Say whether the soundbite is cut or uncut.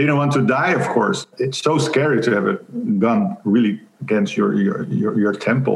cut